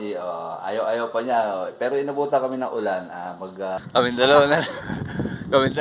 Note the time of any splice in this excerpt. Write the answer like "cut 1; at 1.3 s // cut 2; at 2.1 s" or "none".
cut 1; at 3.8 s